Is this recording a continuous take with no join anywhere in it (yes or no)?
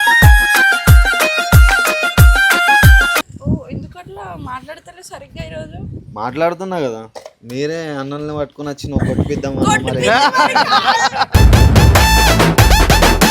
no